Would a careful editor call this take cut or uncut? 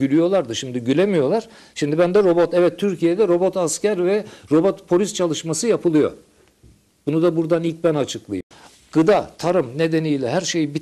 cut